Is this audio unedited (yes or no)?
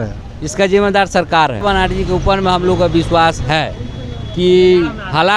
no